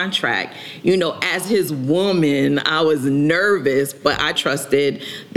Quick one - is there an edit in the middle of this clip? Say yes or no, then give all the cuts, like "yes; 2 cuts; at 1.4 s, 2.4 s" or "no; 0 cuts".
yes; 1 cut; at 4.0 s